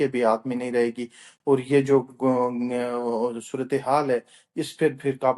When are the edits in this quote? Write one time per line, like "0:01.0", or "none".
none